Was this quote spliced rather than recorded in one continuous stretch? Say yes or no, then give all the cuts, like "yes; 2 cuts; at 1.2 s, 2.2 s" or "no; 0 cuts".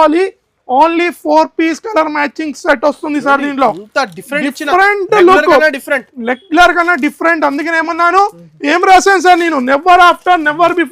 no; 0 cuts